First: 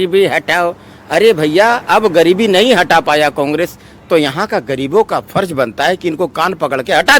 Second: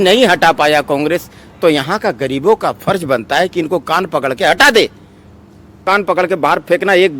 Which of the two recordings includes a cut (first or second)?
second